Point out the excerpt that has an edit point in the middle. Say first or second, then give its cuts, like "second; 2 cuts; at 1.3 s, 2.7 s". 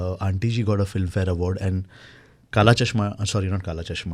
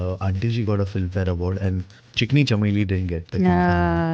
second; 1 cut; at 2.0 s